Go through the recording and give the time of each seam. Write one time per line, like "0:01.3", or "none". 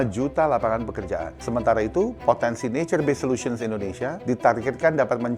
0:01.3
0:04.2